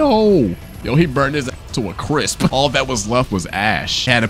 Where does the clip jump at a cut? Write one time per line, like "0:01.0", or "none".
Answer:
none